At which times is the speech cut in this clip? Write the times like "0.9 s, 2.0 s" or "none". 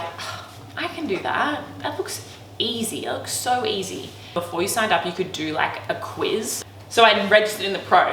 4.4 s, 6.6 s